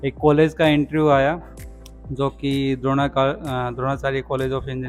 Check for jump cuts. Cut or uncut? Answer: uncut